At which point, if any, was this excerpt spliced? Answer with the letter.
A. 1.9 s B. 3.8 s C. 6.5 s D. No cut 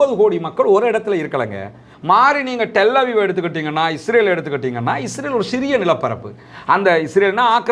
A